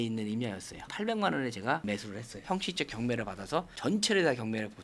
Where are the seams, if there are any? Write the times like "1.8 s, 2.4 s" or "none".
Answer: 0.9 s, 2.4 s